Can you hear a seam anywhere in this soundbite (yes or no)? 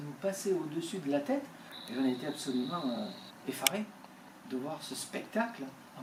no